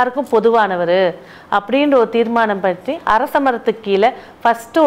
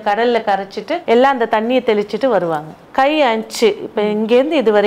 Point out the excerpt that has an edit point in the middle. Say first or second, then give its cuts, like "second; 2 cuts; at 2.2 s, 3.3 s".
second; 2 cuts; at 0.9 s, 2.8 s